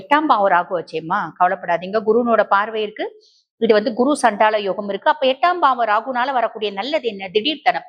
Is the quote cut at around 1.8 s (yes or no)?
no